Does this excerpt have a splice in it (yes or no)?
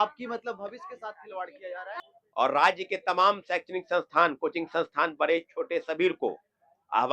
yes